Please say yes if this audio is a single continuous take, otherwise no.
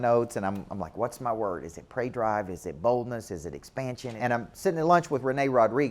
no